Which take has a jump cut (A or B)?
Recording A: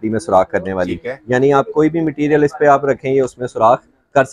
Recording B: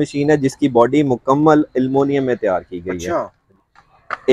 B